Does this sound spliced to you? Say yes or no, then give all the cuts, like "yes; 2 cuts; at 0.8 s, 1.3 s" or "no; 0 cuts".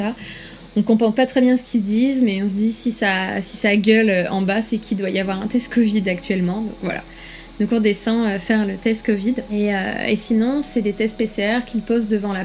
yes; 1 cut; at 9.5 s